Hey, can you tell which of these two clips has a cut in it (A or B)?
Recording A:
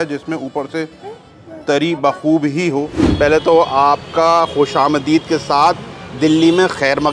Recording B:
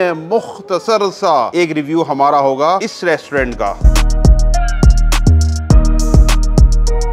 A